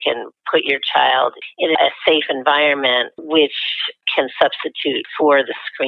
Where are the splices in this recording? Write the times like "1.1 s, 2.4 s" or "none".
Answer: 1.8 s, 3.2 s, 4.0 s, 5.1 s